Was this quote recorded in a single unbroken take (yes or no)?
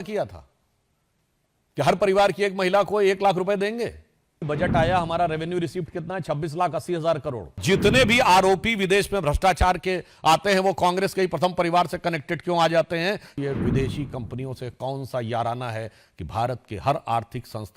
no